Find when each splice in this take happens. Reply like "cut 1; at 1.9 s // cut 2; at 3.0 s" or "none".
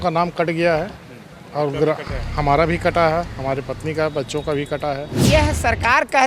cut 1; at 5.3 s